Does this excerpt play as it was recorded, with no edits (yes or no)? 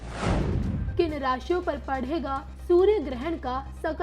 yes